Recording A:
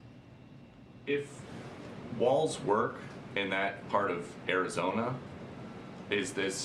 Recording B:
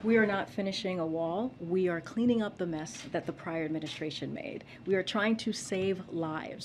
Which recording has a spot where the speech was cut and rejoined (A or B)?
B